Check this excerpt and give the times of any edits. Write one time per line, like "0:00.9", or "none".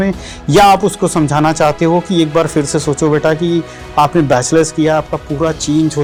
none